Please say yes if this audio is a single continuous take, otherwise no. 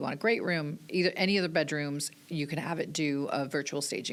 yes